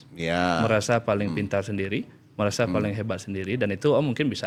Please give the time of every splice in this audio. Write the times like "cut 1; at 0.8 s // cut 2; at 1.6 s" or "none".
none